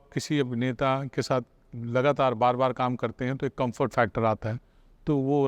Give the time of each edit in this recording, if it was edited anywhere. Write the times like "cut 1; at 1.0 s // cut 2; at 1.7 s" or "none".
none